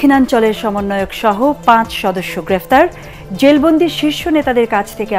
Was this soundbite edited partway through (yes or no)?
no